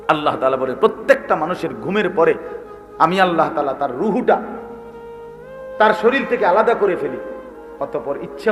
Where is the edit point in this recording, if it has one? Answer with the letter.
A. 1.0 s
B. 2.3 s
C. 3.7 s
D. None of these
D